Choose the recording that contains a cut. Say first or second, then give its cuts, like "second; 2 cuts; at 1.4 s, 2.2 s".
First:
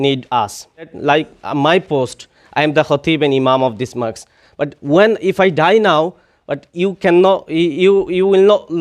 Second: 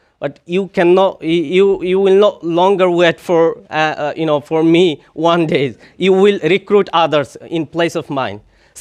first; 1 cut; at 0.9 s